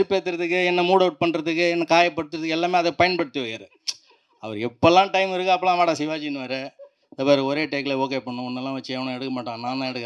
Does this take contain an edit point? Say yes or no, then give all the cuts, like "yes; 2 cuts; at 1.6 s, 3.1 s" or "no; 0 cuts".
no; 0 cuts